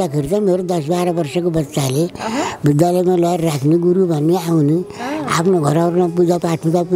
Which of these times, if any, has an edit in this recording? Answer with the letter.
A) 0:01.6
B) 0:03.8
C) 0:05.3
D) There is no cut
D